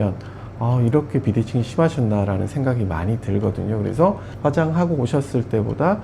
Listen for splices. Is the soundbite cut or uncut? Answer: cut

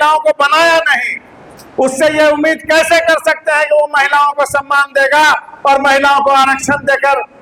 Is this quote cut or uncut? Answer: uncut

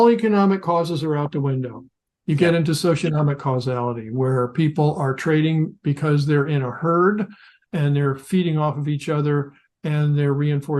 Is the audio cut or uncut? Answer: uncut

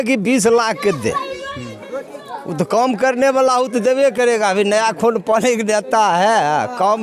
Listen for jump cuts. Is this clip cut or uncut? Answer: uncut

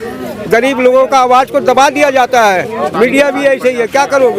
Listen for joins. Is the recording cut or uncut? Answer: uncut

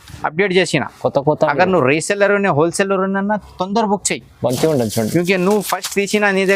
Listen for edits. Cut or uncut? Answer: uncut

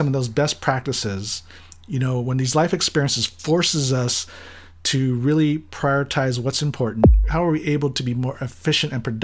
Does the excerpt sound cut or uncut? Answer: cut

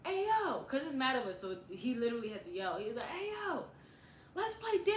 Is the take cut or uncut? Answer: uncut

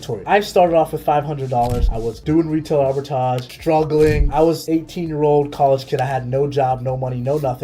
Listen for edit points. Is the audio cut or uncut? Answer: cut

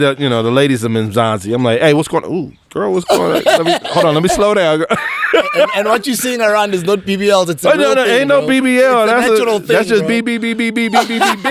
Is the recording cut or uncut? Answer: uncut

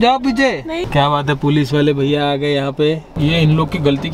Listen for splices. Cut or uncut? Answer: cut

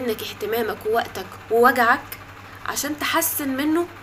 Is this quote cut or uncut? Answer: uncut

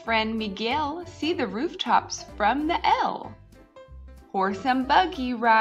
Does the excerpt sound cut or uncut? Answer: uncut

